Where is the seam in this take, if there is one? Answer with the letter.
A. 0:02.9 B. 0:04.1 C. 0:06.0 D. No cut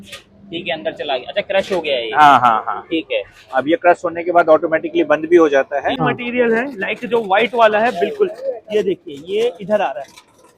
C